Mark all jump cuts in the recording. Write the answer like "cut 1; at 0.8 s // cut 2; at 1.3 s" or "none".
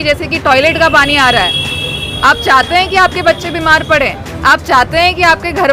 none